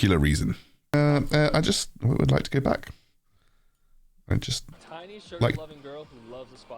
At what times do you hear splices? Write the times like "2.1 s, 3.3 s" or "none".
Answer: 0.9 s